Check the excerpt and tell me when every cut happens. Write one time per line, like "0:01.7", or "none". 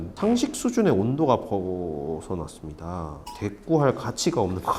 0:03.4